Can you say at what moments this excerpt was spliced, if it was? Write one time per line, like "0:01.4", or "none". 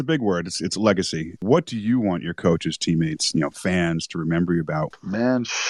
0:01.4
0:04.9